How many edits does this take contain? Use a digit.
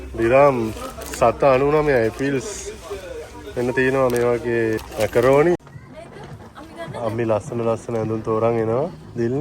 2